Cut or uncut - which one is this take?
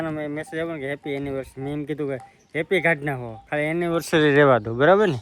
uncut